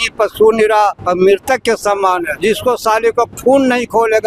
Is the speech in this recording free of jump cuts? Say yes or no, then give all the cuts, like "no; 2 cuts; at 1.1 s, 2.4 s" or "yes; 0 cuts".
no; 2 cuts; at 1.0 s, 2.3 s